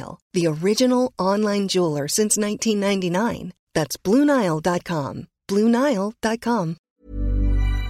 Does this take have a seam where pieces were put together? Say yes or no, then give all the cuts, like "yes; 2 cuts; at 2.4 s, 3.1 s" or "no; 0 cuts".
yes; 1 cut; at 6.9 s